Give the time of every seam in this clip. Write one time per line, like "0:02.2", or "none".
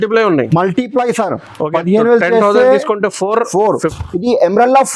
0:03.8